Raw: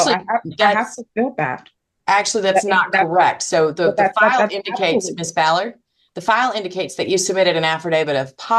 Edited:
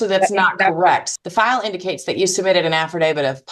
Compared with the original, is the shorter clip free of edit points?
no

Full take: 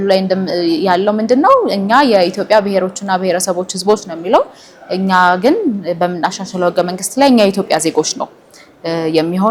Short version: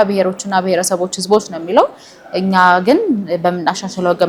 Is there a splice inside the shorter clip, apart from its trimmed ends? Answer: no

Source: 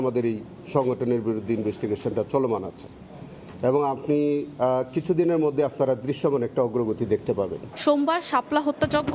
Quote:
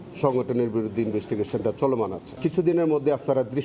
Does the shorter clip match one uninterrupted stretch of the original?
no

